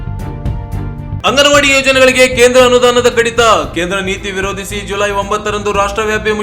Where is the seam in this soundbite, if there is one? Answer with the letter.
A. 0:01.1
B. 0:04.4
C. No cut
A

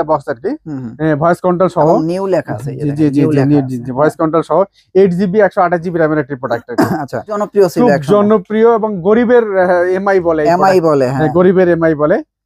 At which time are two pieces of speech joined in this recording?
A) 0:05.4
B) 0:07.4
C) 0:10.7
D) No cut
B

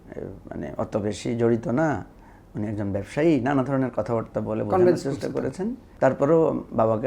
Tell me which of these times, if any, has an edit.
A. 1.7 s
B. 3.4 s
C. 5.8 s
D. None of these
C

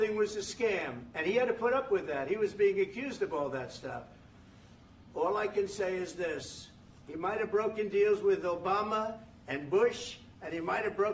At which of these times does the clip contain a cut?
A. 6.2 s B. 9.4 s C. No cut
C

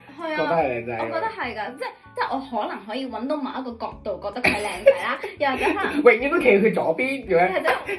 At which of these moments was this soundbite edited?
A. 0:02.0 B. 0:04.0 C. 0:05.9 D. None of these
A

